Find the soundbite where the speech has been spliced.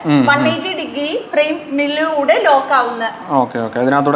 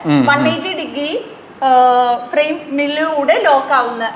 first; 1 cut; at 1.3 s

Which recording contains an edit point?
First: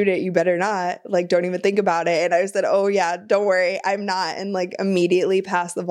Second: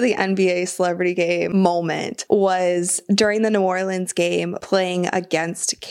second; 2 cuts; at 1.6 s, 4.6 s

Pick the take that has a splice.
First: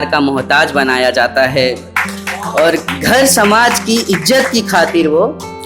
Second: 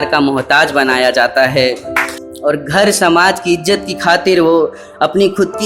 second; 1 cut; at 2.2 s

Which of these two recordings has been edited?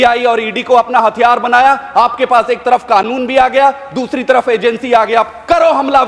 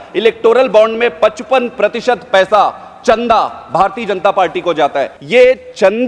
second; 1 cut; at 5.2 s

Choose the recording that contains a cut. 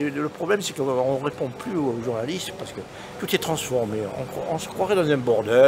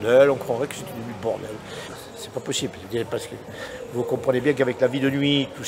second; 1 cut; at 1.9 s

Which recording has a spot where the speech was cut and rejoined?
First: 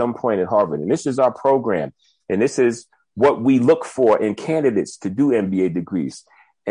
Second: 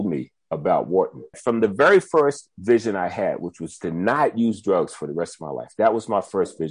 second; 1 cut; at 1.4 s

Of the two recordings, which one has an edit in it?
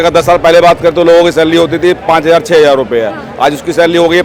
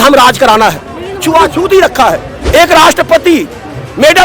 second; 1 cut; at 2.3 s

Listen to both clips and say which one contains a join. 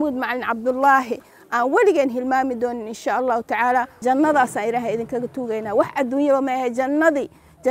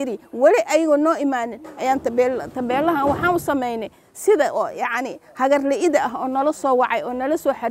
first; 1 cut; at 3.9 s

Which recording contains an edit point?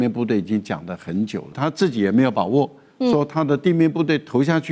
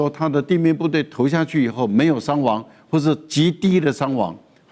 first; 1 cut; at 1.6 s

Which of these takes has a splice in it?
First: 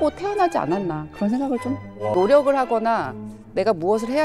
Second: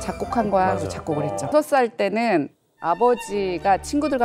first; 1 cut; at 2.1 s

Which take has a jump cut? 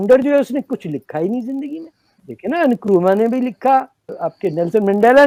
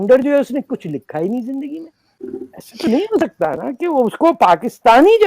second; 1 cut; at 2.3 s

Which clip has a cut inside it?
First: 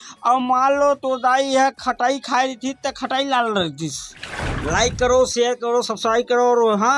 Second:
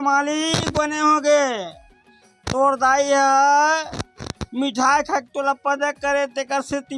first; 1 cut; at 4.3 s

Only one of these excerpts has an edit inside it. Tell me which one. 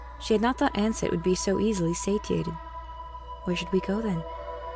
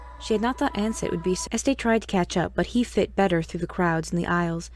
first; 1 cut; at 1.4 s

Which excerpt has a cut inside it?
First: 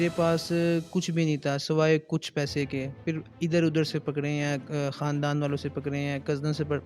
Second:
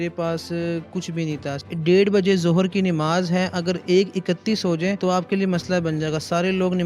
second; 2 cuts; at 1.6 s, 5.0 s

